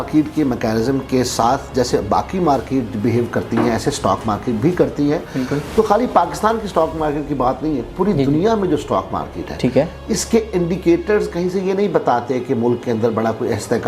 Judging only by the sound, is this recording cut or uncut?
uncut